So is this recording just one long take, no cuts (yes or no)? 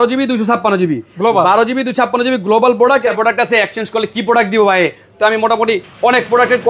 no